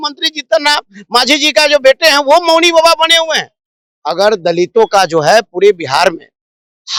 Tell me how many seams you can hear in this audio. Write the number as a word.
zero